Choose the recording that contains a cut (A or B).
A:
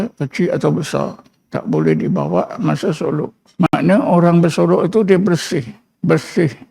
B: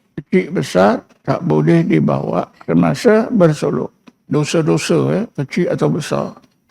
B